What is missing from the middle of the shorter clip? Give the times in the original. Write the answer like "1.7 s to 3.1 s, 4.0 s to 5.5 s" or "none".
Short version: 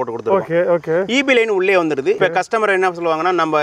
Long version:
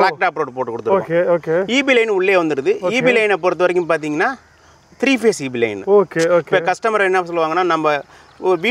2.8 s to 6.5 s